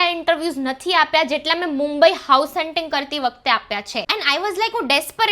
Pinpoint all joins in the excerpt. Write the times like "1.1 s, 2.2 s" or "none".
4.1 s